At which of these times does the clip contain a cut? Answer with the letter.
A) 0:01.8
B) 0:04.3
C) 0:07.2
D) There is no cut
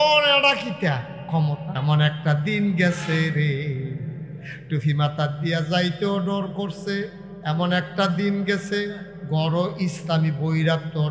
A